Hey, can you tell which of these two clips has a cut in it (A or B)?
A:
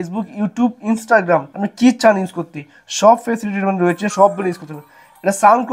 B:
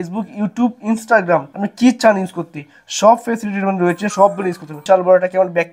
B